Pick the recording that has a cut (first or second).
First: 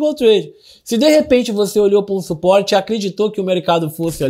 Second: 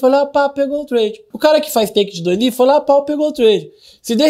second